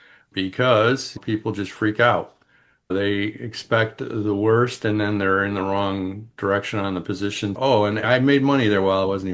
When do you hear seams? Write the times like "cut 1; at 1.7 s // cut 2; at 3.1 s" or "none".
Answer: cut 1; at 7.5 s